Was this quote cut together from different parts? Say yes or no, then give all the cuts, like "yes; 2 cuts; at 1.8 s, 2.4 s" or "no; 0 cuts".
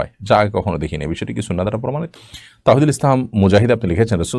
yes; 1 cut; at 2.1 s